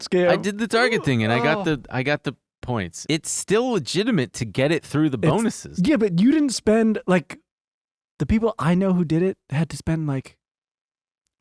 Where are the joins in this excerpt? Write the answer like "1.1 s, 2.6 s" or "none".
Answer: 3.0 s, 5.6 s